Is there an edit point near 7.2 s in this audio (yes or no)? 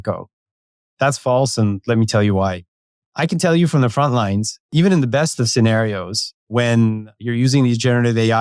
yes